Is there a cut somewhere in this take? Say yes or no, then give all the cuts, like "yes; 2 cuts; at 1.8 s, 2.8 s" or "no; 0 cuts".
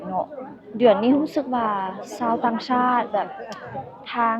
no; 0 cuts